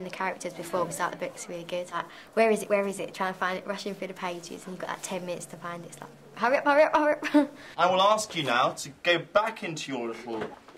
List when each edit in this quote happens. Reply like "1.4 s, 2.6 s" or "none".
7.5 s